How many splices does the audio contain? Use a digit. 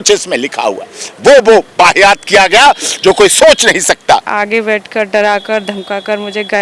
1